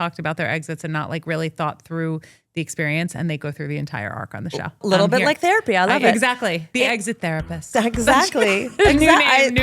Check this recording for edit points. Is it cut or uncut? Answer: cut